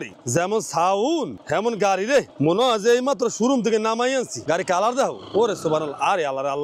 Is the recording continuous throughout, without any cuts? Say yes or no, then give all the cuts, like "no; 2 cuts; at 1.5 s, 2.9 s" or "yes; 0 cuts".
no; 1 cut; at 4.3 s